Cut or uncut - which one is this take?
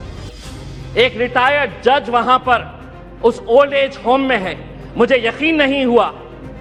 uncut